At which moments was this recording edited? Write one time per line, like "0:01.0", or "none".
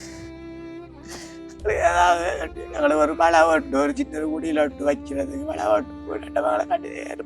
0:01.5